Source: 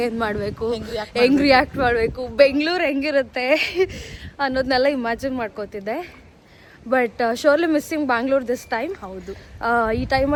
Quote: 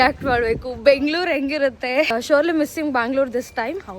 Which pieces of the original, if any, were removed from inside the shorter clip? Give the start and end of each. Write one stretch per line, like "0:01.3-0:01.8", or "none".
0:03.6-0:07.3